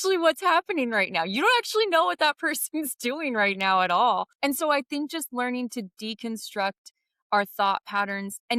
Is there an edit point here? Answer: no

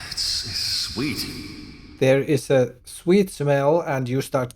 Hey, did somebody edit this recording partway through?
yes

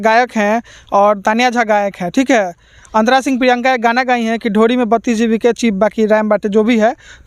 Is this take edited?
no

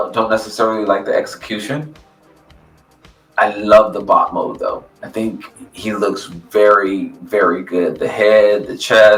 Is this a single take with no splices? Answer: yes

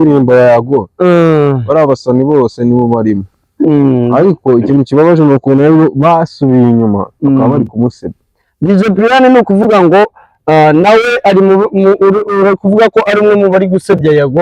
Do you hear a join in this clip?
no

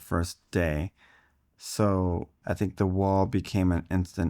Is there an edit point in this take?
yes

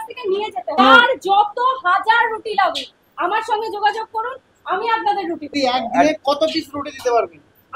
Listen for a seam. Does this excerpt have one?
yes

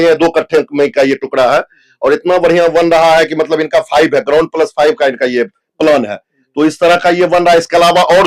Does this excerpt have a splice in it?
no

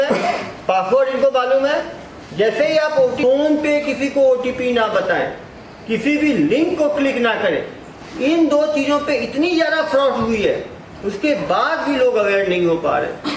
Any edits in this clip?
yes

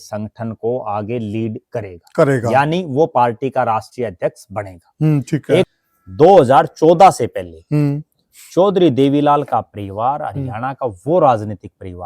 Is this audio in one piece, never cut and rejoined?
no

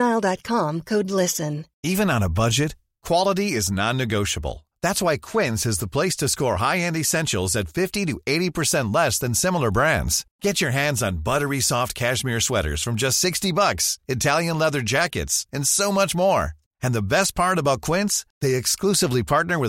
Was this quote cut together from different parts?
yes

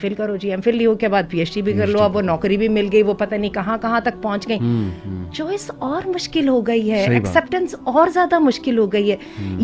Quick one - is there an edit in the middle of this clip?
no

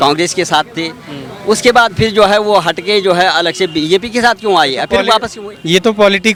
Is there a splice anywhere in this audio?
no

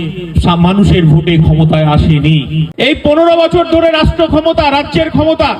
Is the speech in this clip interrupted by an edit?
yes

